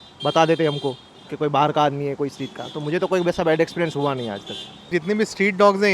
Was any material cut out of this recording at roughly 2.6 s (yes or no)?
no